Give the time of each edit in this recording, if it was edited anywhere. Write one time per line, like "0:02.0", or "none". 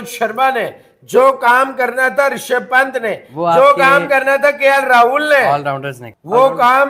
none